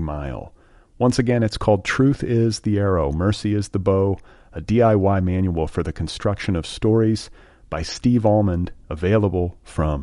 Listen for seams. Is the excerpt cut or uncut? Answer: uncut